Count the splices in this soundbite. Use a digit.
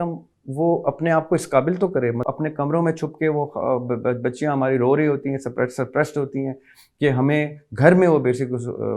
1